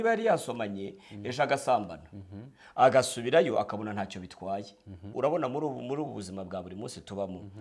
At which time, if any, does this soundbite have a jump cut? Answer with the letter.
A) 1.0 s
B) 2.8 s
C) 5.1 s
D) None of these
C